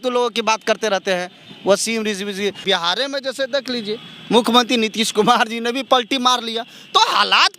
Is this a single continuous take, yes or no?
no